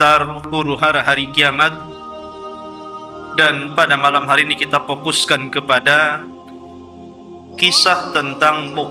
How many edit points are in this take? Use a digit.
4